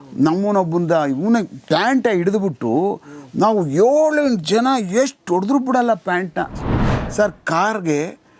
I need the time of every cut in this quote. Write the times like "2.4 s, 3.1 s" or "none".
6.9 s

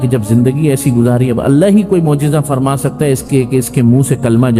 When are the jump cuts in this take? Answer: none

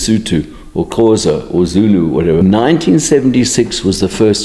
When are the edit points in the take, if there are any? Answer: 2.4 s

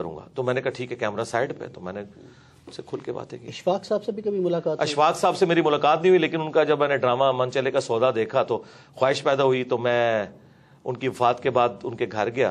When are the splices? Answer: none

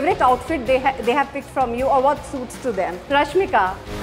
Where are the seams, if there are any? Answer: 3.0 s

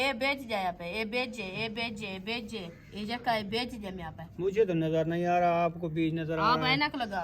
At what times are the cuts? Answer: none

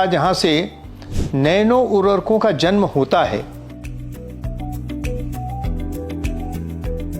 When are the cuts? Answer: none

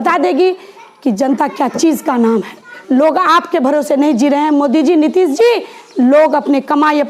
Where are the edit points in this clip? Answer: 2.8 s

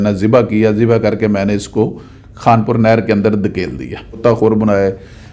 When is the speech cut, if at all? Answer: 4.2 s

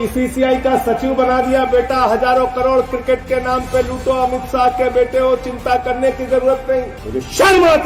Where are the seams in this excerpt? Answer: 7.0 s

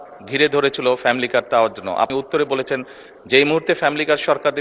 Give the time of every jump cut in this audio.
2.1 s

